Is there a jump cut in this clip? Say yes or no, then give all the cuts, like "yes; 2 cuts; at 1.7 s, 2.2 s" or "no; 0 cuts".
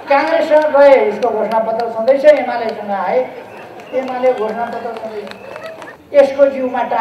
yes; 1 cut; at 5.9 s